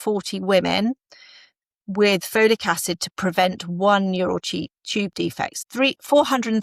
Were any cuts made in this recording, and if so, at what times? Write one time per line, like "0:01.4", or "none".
0:05.5